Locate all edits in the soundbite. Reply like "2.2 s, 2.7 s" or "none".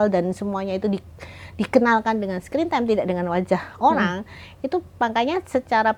none